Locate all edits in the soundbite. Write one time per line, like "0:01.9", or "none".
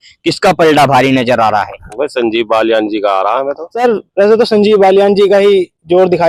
0:03.6